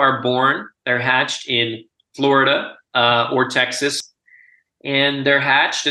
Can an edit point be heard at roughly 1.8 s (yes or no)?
no